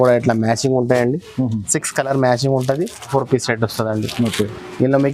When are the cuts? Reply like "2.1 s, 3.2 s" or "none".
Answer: 3.1 s